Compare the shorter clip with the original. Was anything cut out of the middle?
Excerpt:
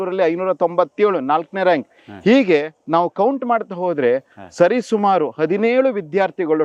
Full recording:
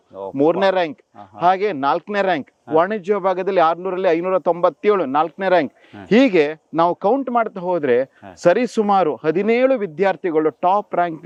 no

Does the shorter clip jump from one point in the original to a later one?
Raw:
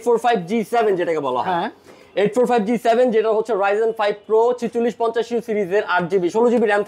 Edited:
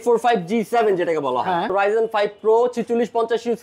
yes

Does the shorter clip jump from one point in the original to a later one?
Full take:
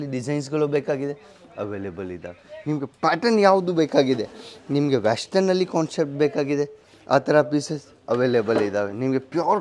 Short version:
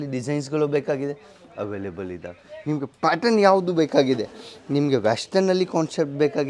no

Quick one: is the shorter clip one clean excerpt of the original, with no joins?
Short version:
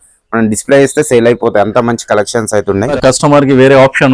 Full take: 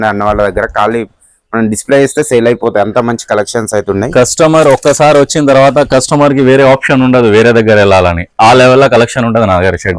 no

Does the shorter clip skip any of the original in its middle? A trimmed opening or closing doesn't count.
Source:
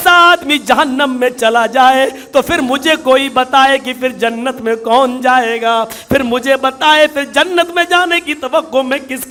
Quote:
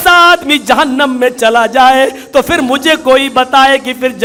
no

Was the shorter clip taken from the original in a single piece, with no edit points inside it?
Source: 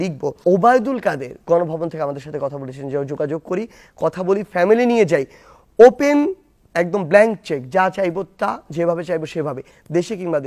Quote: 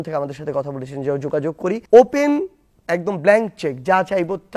no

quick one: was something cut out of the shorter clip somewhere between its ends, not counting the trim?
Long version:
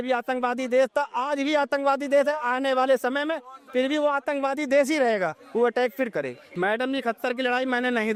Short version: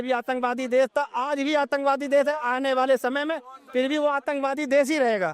no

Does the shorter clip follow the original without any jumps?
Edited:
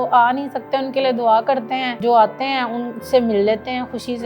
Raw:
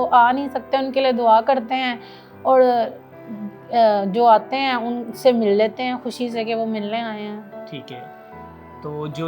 no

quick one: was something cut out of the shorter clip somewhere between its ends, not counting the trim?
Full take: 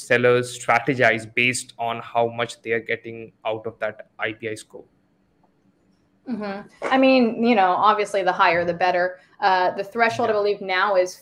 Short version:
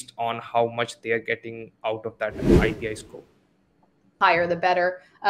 yes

